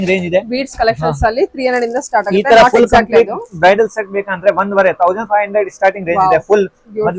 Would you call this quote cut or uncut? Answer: uncut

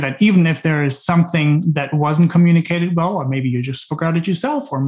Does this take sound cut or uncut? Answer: uncut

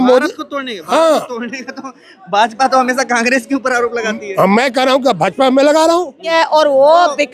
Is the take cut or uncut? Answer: cut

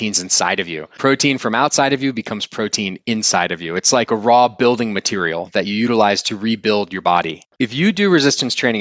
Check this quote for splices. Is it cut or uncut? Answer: cut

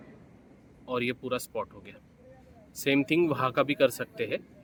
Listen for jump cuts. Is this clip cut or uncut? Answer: uncut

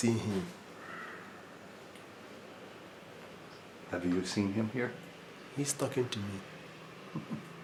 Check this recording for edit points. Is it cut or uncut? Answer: uncut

